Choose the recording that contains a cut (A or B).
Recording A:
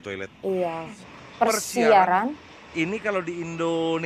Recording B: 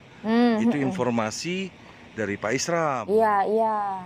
A